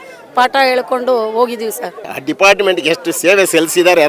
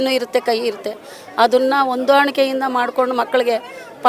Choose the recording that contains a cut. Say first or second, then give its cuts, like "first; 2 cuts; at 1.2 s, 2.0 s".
first; 1 cut; at 2.2 s